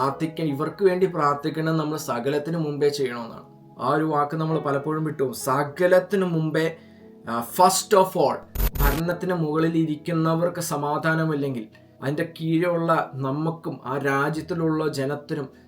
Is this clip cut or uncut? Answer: cut